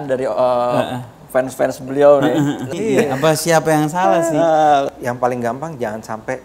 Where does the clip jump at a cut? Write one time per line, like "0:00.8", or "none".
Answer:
0:02.7
0:04.9